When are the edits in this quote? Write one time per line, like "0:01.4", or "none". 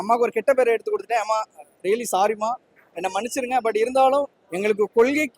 0:04.4